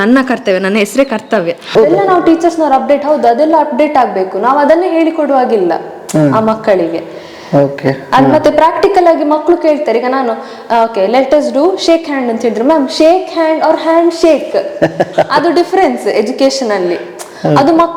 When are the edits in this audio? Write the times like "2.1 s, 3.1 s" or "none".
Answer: 1.7 s